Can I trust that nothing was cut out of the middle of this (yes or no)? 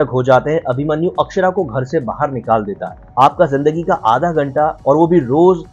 no